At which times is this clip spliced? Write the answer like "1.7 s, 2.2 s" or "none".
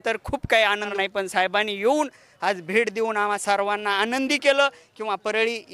0.9 s